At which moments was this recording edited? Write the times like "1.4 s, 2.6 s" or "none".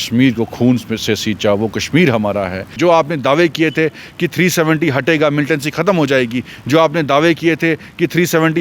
2.7 s